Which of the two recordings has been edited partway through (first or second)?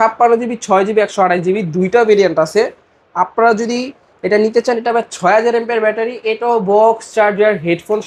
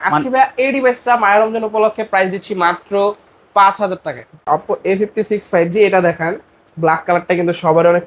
second